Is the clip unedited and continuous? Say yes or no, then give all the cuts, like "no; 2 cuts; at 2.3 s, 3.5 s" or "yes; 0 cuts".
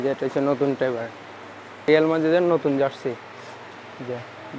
no; 1 cut; at 1.9 s